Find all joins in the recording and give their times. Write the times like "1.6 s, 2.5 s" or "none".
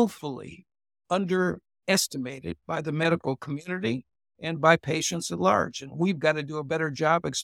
none